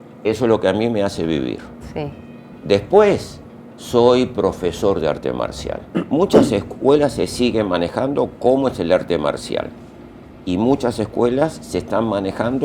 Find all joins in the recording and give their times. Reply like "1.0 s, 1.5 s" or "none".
2.6 s, 5.8 s